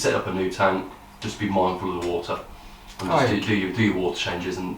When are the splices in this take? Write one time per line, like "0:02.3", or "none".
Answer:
none